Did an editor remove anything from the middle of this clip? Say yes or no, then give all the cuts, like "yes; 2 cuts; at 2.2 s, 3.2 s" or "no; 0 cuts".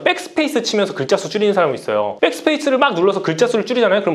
no; 0 cuts